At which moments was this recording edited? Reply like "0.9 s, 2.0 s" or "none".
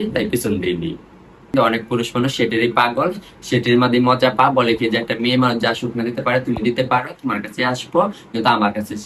1.5 s